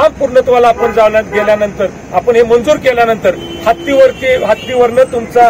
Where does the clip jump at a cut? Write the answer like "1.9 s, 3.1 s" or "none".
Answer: none